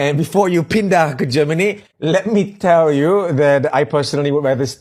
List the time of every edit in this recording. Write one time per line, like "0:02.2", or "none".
none